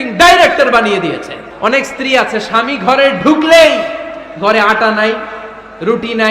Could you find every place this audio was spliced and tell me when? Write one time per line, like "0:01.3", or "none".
0:01.4